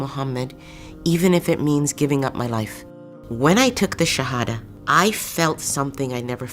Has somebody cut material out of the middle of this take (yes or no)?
yes